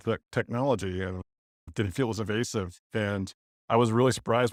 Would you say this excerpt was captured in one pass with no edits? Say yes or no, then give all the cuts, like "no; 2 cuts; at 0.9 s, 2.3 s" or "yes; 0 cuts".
yes; 0 cuts